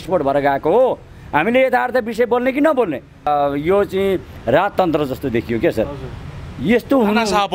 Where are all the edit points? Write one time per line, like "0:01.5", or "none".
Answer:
0:03.3